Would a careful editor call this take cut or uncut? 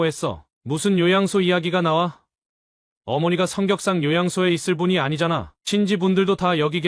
uncut